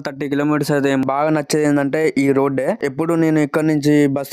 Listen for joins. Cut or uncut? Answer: cut